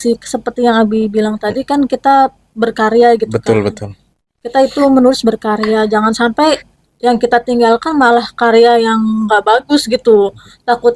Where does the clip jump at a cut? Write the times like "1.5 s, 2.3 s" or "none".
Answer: none